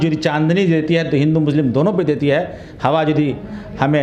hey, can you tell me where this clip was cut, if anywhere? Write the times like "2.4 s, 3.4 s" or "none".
none